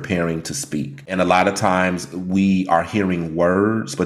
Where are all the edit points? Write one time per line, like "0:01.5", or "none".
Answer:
0:01.0